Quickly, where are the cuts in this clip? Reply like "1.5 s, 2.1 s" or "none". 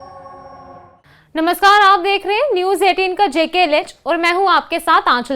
0.9 s

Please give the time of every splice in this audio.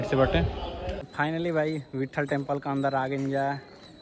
1.0 s

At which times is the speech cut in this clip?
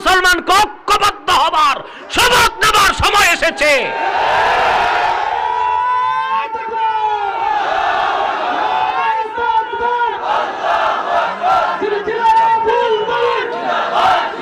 none

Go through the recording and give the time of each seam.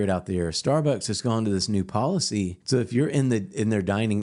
2.9 s

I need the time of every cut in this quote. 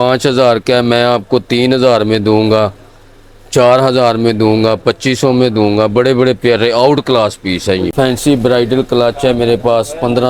7.9 s

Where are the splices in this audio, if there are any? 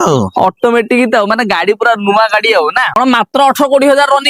3.0 s

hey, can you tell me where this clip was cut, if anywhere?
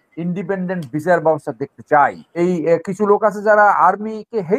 2.3 s

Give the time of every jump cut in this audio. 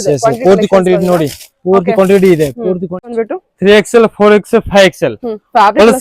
3.1 s

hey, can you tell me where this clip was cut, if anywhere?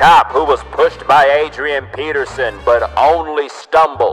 none

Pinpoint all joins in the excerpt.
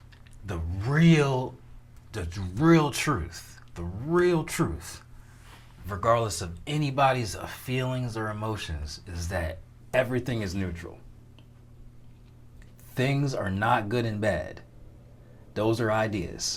none

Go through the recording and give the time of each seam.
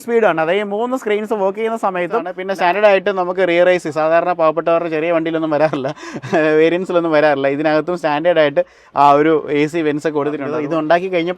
2.4 s, 10.5 s

